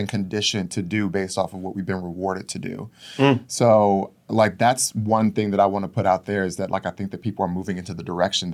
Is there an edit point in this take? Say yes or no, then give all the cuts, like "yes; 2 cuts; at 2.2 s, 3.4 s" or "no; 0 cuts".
no; 0 cuts